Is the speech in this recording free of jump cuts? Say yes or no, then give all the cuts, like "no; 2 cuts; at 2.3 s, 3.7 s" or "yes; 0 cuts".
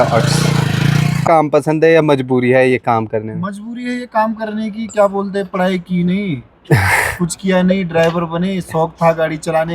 no; 1 cut; at 1.2 s